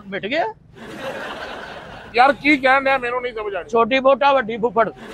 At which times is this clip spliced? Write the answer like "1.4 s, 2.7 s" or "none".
2.0 s

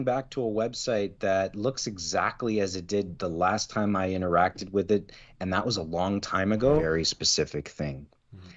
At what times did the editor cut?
6.9 s

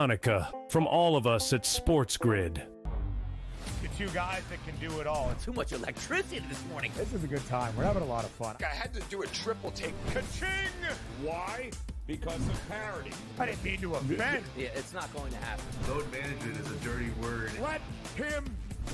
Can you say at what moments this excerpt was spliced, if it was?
2.8 s

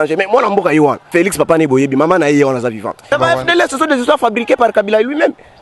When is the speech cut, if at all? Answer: 1.1 s, 3.1 s

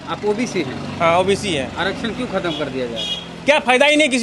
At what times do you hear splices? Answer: none

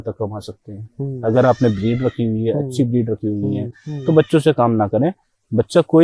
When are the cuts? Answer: 3.9 s

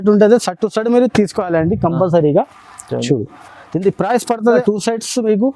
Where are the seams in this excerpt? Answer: 4.6 s

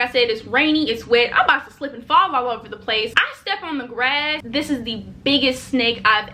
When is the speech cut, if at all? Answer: 3.1 s, 4.4 s

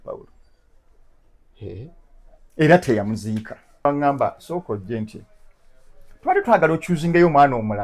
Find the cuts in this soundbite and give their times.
3.8 s

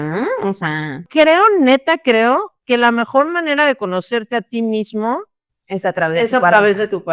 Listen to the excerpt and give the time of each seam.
1.1 s

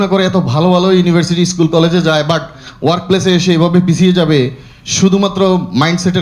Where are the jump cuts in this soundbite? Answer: none

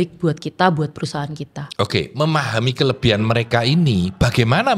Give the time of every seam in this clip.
none

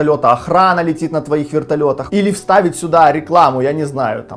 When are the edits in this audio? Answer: 2.0 s

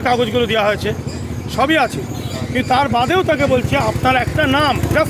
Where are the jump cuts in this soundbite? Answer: none

